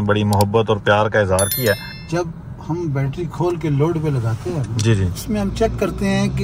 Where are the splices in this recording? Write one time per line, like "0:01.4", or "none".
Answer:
0:01.9

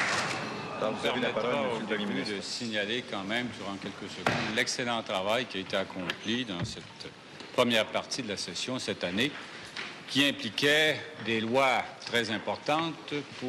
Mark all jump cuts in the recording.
none

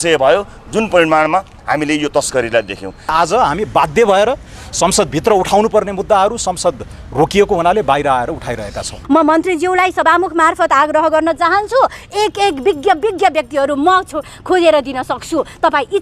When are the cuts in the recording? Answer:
0:03.1
0:09.0

